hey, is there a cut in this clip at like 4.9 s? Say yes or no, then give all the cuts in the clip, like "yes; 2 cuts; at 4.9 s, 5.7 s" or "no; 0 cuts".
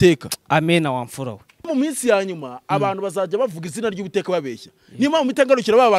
no; 1 cut; at 1.6 s